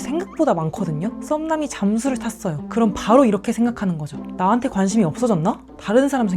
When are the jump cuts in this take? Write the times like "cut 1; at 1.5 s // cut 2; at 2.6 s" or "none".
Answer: cut 1; at 1.2 s // cut 2; at 2.6 s